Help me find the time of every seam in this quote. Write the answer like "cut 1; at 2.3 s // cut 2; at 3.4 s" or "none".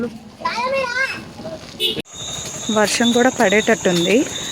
cut 1; at 2.1 s